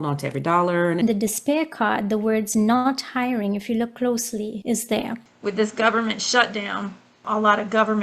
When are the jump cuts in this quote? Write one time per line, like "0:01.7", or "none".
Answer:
0:01.0
0:04.6
0:05.2
0:07.2